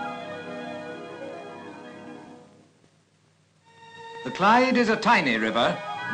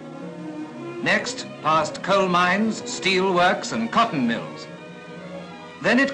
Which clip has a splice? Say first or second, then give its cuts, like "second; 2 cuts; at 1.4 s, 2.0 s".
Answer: first; 1 cut; at 1.5 s